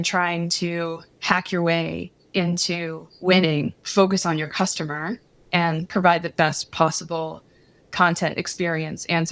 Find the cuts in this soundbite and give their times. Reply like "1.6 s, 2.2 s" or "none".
1.1 s, 3.8 s